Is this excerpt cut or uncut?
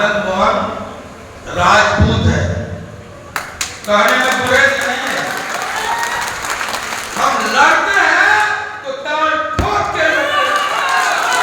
uncut